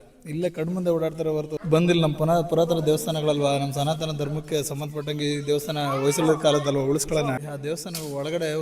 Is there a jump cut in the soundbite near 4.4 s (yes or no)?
no